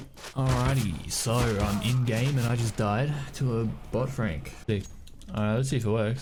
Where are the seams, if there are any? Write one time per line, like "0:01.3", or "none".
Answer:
none